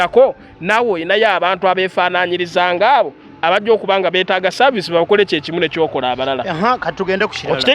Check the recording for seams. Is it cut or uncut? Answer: uncut